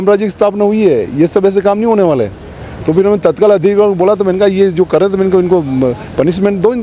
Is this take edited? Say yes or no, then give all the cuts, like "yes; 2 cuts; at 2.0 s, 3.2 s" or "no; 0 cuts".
no; 0 cuts